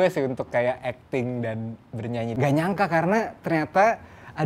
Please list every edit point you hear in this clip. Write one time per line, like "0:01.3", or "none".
0:02.3